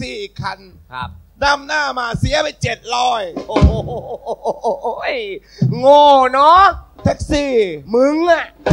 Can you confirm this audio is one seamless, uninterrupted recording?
yes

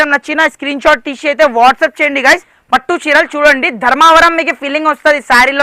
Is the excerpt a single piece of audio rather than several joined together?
no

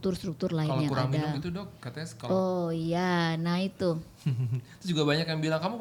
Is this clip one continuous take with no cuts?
yes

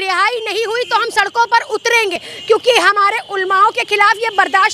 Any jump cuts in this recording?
yes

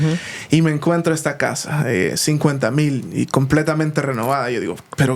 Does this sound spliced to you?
no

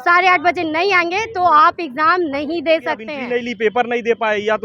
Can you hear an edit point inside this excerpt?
yes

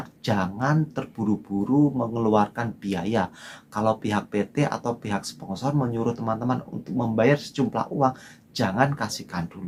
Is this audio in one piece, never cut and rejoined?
yes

